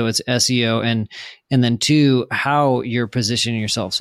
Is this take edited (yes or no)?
no